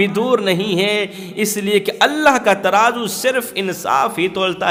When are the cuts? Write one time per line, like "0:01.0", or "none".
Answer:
none